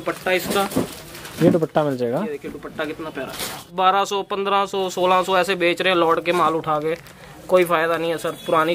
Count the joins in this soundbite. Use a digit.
1